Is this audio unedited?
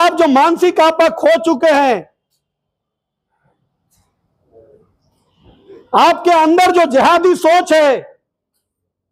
yes; 0 cuts

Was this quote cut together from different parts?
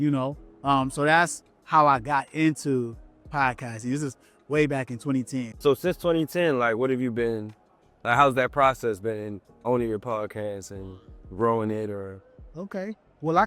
yes; 1 cut; at 5.5 s

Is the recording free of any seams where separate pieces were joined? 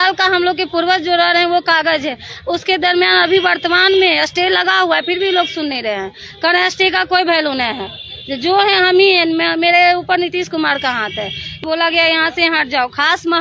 no; 1 cut; at 11.6 s

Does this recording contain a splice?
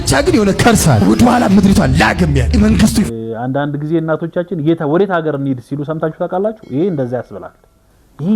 yes; 1 cut; at 3.1 s

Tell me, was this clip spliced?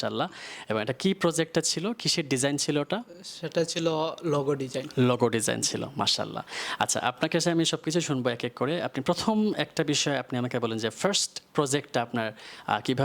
no; 0 cuts

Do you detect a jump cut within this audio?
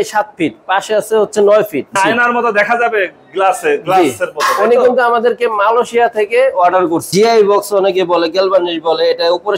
yes; 2 cuts; at 2.0 s, 7.1 s

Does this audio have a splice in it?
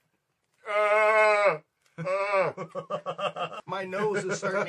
yes; 1 cut; at 3.6 s

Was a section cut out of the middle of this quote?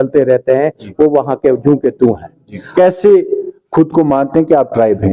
yes; 1 cut; at 2.6 s

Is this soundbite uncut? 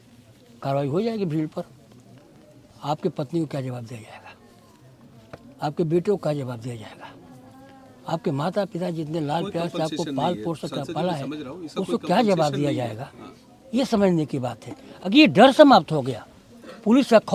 yes; 0 cuts

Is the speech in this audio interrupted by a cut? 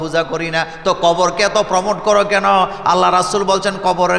no; 0 cuts

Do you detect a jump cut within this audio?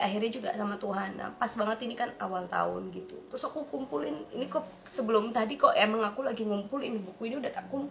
yes; 1 cut; at 3.3 s

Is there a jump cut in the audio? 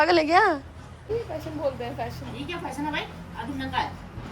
yes; 1 cut; at 1.1 s

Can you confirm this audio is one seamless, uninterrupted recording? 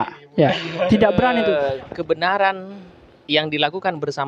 no; 1 cut; at 1.7 s

